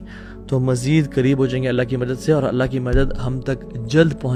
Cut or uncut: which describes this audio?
uncut